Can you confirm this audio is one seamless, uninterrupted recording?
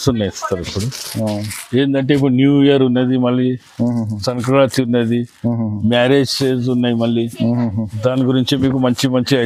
yes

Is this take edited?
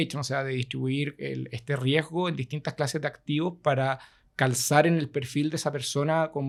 no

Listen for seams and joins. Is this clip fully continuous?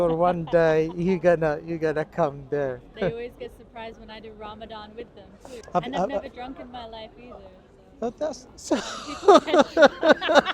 no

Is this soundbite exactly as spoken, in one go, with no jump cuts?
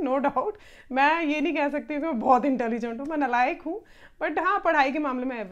yes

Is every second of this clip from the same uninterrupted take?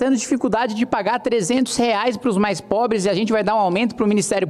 yes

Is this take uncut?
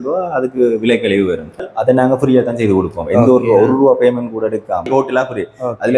no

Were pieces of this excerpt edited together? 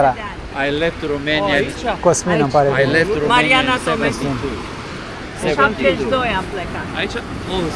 no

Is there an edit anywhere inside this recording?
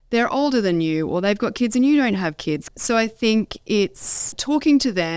yes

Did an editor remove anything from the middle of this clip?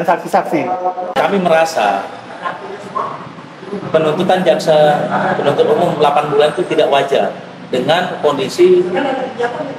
yes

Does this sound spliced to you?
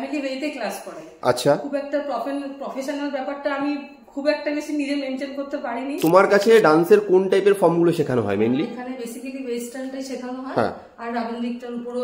yes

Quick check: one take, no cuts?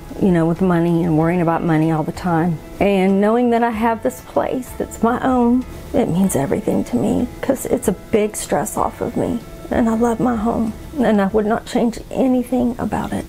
no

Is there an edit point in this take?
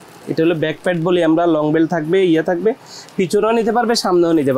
no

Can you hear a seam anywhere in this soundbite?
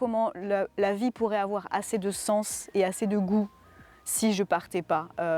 no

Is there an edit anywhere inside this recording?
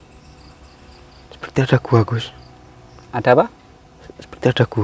no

